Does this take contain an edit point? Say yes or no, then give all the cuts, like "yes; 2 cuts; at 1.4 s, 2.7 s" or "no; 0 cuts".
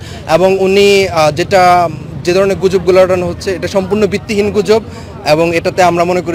no; 0 cuts